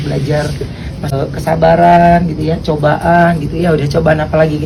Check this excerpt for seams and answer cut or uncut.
uncut